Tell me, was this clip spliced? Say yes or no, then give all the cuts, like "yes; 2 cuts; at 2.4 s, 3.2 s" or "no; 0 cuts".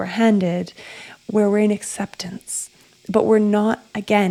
no; 0 cuts